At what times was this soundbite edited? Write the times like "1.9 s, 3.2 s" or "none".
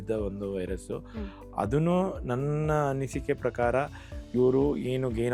none